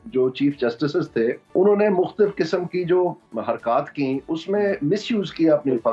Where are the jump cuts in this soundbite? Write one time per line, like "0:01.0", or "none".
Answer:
0:01.4
0:03.2